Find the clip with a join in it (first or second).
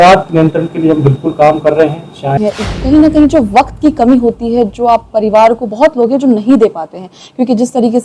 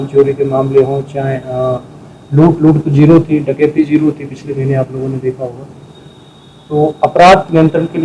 first